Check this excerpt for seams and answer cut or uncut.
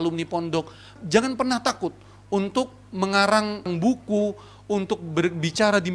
cut